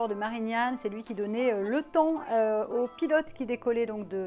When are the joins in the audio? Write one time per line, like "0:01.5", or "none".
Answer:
none